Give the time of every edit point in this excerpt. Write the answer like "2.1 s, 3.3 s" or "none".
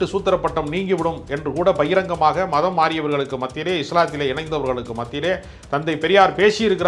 none